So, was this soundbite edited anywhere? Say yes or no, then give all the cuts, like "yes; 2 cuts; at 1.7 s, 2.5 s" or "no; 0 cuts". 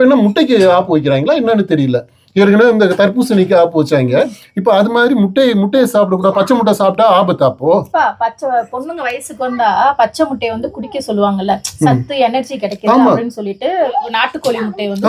no; 0 cuts